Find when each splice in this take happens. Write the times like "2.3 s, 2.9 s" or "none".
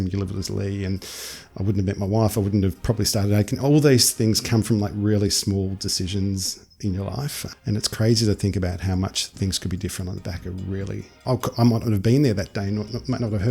11.2 s